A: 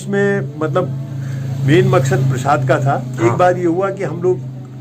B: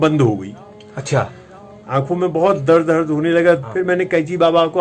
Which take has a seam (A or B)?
B